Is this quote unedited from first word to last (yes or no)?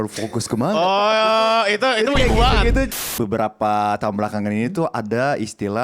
no